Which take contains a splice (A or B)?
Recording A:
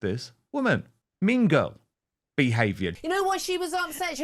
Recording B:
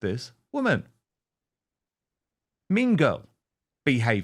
A